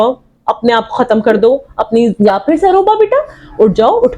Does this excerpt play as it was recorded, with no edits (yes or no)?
no